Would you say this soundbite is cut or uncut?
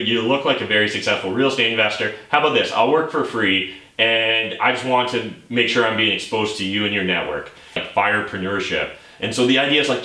cut